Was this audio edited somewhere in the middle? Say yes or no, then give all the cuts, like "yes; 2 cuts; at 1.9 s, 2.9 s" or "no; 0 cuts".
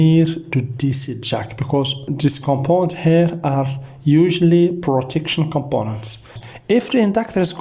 yes; 2 cuts; at 2.0 s, 6.4 s